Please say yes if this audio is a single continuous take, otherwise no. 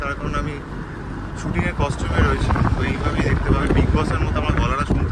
yes